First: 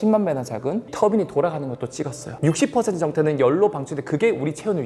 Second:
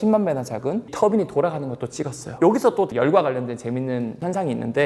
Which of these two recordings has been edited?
first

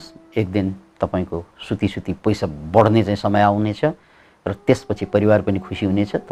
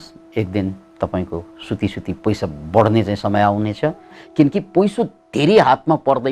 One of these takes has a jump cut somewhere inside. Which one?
second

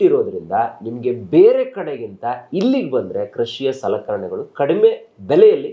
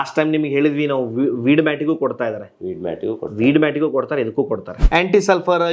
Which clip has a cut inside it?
second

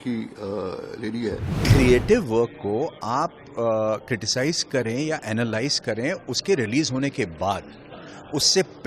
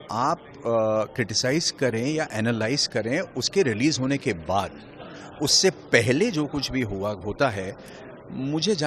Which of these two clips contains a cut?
first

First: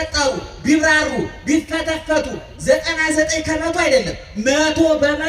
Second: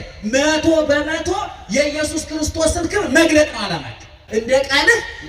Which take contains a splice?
second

